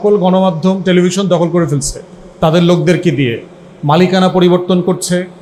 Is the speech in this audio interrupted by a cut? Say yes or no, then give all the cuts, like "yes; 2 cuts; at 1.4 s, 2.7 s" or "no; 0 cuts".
no; 0 cuts